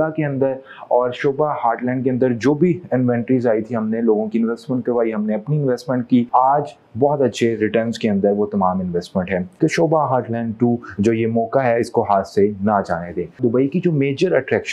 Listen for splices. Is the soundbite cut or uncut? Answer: cut